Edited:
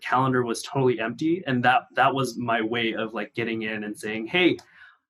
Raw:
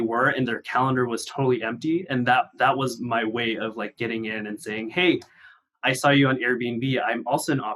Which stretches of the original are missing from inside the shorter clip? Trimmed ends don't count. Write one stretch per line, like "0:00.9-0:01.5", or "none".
none